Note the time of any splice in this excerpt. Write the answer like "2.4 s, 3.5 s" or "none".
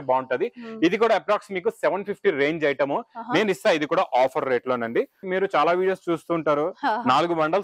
5.3 s